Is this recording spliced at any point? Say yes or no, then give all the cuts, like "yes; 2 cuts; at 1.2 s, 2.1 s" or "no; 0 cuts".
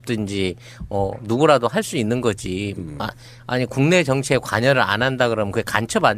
yes; 1 cut; at 1.9 s